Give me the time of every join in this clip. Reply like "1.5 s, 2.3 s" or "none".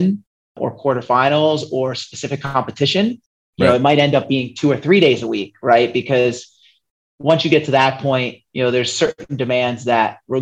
none